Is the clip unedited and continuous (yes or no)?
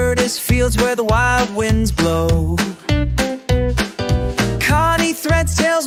yes